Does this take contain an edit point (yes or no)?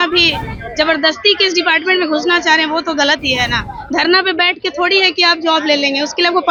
no